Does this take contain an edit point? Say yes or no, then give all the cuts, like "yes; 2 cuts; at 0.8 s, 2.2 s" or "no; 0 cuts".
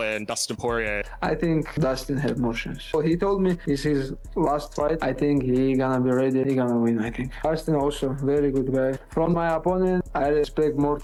no; 0 cuts